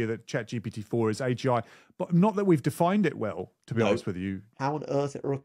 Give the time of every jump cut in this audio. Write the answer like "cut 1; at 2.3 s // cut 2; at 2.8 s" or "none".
cut 1; at 4.5 s